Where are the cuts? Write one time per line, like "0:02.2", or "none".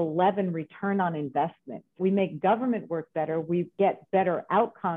0:02.0
0:03.7